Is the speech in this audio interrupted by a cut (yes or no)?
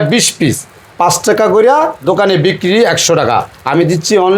no